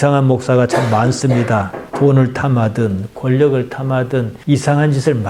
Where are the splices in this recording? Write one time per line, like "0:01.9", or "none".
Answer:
none